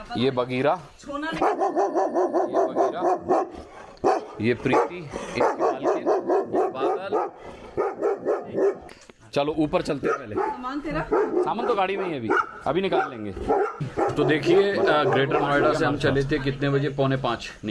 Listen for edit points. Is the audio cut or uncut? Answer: uncut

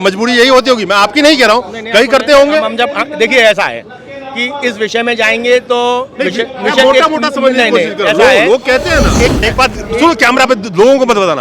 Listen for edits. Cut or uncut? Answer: cut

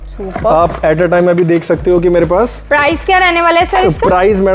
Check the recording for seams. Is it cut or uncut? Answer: uncut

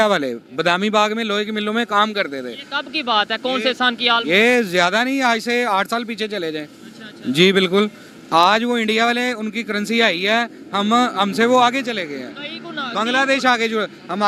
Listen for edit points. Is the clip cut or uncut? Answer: uncut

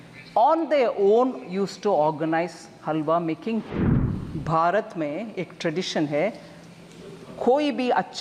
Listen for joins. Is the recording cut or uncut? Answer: cut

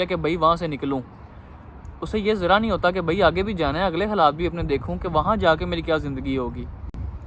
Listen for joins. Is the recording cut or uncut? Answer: uncut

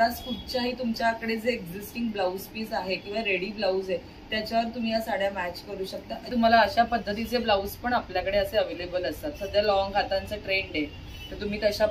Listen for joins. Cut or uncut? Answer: cut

